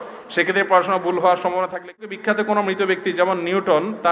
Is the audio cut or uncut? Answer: cut